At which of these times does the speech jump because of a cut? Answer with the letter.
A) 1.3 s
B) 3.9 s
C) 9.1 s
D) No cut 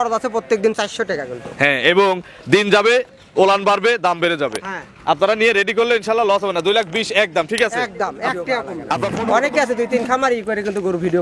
C